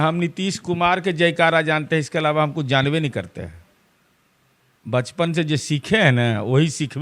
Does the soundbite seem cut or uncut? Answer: uncut